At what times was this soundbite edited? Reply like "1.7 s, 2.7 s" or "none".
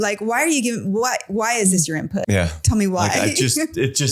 2.2 s